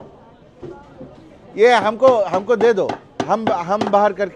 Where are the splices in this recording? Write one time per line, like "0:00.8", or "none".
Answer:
none